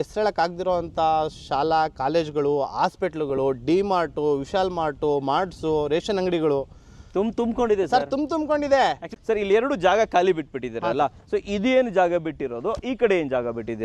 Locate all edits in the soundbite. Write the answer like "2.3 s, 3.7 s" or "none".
9.1 s